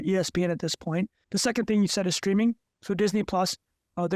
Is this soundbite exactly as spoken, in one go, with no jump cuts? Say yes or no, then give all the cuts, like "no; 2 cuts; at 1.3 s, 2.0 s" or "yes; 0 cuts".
no; 1 cut; at 1.2 s